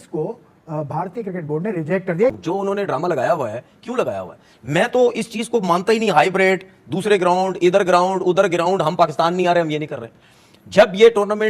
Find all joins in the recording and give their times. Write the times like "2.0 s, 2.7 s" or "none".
2.2 s